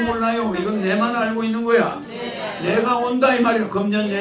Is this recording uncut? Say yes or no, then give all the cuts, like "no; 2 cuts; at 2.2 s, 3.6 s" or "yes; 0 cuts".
yes; 0 cuts